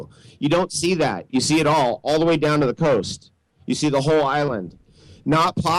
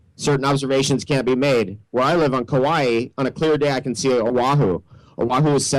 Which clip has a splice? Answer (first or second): second